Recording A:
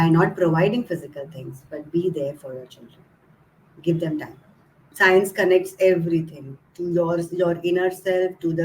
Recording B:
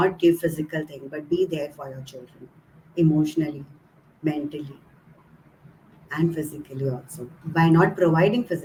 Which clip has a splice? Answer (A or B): A